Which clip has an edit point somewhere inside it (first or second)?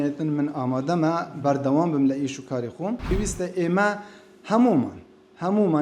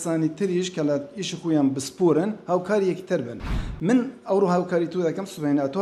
first